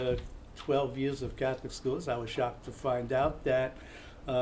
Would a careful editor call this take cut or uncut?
cut